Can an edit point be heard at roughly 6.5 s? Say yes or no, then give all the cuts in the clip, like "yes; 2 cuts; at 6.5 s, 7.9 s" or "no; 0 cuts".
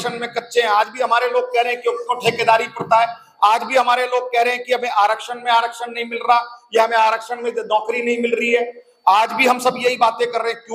no; 0 cuts